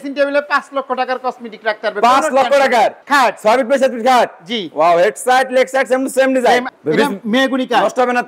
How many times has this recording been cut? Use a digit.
2